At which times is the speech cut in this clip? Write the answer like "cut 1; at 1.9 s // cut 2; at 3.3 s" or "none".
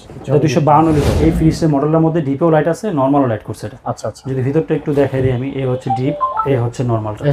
cut 1; at 1.1 s // cut 2; at 6.4 s